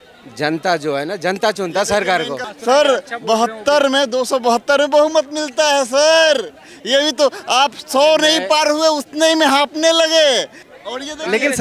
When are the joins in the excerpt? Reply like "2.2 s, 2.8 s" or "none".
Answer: 2.5 s, 10.6 s